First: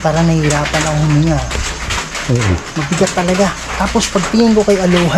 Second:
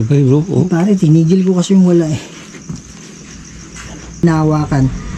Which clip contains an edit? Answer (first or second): second